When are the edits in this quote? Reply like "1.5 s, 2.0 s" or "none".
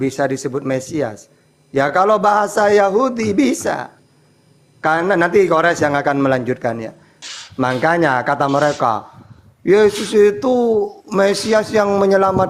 7.2 s